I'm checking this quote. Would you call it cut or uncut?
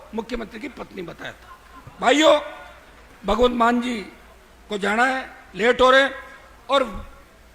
uncut